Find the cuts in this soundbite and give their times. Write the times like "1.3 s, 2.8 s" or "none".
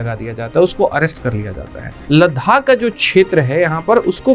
2.0 s